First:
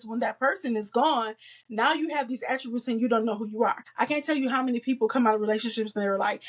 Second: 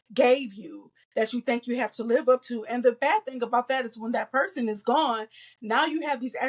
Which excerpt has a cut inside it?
first; 1 cut; at 3.8 s

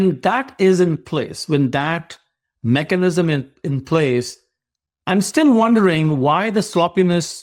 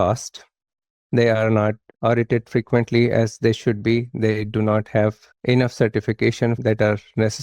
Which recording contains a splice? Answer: second; 3 cuts; at 1.9 s, 5.3 s, 6.6 s

